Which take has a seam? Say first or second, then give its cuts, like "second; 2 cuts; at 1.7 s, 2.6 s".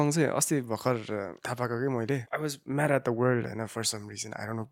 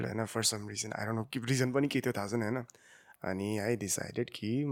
first; 2 cuts; at 1.4 s, 2.3 s